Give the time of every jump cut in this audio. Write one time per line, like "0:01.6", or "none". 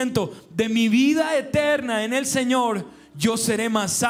none